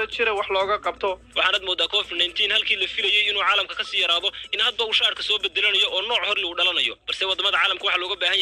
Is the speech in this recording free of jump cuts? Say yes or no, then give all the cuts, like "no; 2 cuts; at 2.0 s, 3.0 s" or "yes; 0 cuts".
no; 1 cut; at 1.3 s